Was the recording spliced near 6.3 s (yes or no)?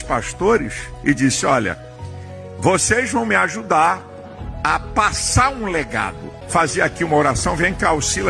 yes